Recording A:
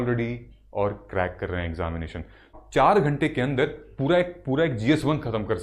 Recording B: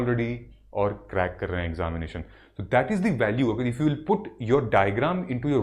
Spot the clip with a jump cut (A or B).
A